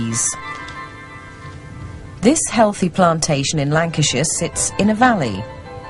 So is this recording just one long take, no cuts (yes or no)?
no